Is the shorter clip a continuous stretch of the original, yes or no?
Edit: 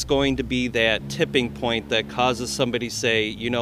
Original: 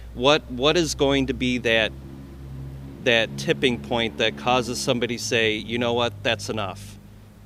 no